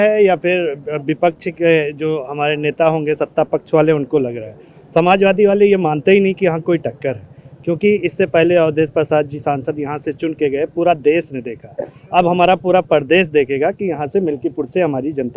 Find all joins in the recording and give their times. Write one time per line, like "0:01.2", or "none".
none